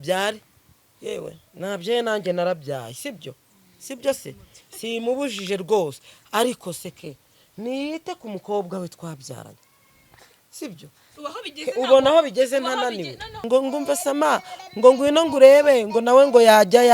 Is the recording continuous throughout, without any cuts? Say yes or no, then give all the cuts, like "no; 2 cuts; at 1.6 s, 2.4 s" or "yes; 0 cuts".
no; 1 cut; at 13.4 s